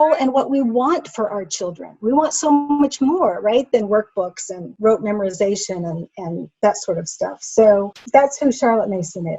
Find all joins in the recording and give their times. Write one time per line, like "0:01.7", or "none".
0:08.0